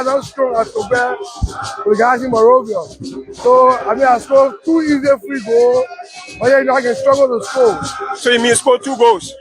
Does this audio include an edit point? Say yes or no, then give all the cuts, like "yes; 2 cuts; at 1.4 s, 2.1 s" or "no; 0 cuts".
yes; 1 cut; at 5.3 s